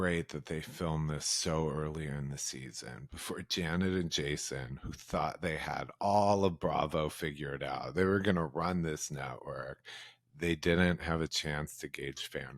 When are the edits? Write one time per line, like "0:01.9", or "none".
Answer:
none